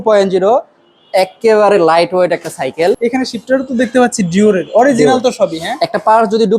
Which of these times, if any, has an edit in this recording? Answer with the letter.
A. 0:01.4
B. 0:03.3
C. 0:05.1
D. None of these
B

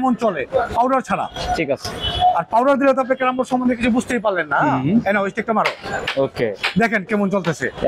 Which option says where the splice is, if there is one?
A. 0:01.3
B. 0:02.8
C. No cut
C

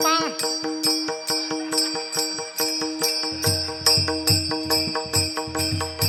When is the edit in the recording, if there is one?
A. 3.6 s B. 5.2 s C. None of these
C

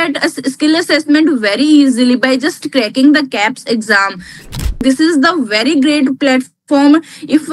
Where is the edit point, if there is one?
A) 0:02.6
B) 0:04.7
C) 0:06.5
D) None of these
B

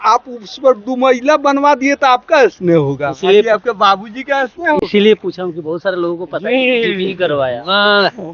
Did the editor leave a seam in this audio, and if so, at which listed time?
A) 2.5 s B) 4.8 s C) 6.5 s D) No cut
D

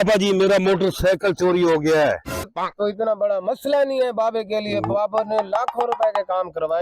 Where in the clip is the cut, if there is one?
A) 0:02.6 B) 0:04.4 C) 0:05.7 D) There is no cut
A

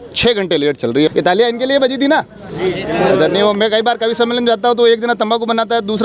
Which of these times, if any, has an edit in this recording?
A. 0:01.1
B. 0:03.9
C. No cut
A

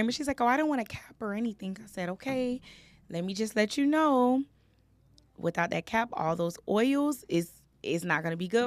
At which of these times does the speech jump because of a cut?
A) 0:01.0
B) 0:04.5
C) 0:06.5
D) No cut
D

